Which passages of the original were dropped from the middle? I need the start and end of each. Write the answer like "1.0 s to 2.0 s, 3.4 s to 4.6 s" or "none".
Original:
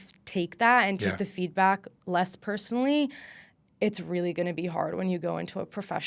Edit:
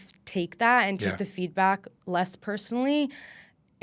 none